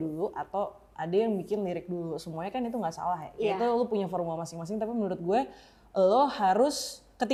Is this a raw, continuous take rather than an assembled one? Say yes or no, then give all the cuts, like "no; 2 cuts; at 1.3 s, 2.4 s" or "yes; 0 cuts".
yes; 0 cuts